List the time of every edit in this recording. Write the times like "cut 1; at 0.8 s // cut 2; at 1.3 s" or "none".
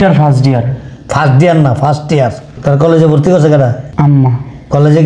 cut 1; at 2.5 s // cut 2; at 3.8 s

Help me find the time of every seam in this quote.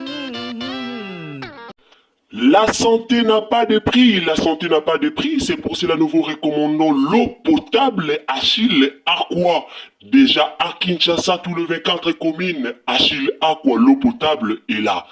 cut 1; at 1.6 s

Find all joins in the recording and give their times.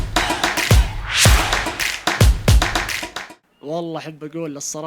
none

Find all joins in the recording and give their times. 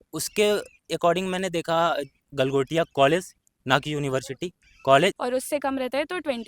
cut 1; at 5.2 s

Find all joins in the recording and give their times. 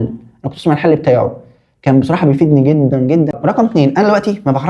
cut 1; at 3.3 s

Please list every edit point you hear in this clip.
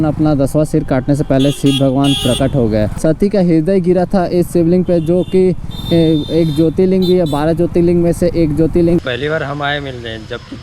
cut 1; at 2.9 s // cut 2; at 9.0 s

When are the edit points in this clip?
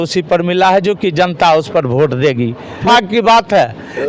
cut 1; at 2.8 s

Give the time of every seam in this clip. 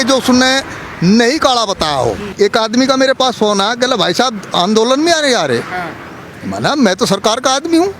cut 1; at 2.2 s

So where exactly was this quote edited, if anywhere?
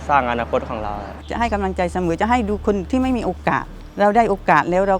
cut 1; at 1.1 s

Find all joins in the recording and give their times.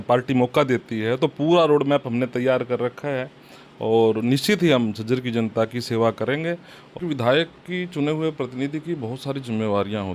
cut 1; at 7.0 s

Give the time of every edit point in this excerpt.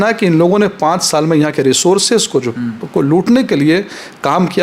none

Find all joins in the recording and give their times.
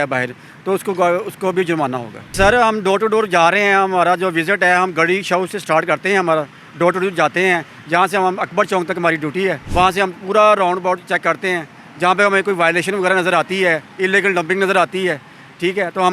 cut 1; at 2.3 s // cut 2; at 9.6 s

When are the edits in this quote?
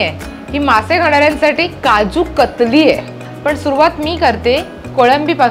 cut 1; at 3.2 s

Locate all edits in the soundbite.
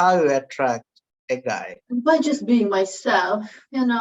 cut 1; at 1.8 s

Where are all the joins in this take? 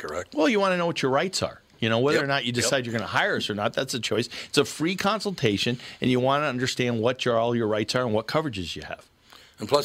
none

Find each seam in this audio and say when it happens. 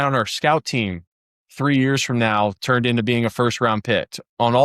none

